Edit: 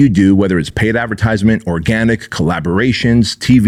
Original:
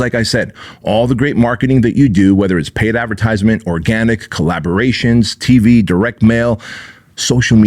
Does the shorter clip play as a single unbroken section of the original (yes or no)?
yes